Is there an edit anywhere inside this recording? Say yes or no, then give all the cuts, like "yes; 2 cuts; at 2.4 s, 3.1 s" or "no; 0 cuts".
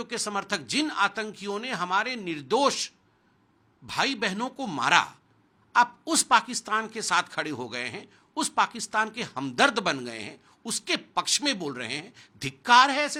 no; 0 cuts